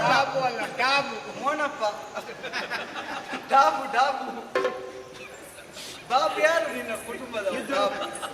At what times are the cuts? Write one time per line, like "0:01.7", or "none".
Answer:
none